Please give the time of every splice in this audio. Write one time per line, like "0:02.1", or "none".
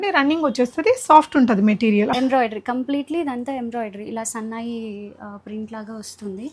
0:02.1